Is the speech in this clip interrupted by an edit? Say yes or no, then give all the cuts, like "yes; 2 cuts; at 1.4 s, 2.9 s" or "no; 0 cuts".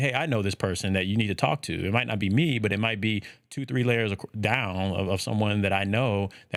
no; 0 cuts